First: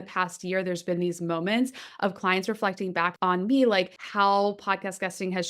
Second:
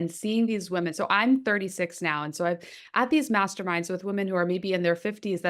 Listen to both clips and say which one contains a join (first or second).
first